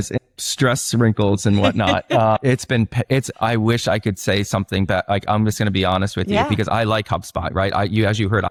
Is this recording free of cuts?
yes; 0 cuts

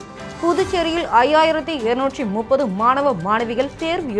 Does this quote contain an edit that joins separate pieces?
no; 0 cuts

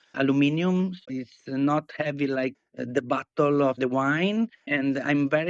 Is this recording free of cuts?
no; 3 cuts; at 1.0 s, 2.6 s, 4.7 s

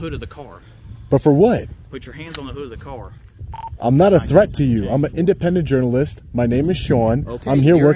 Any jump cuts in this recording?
no; 0 cuts

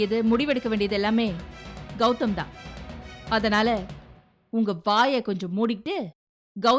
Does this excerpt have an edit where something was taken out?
no; 0 cuts

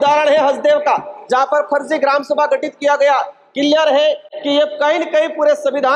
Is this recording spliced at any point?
no; 0 cuts

